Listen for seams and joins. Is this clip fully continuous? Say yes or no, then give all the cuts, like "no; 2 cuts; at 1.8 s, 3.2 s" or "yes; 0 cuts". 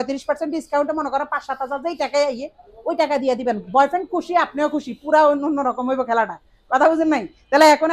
yes; 0 cuts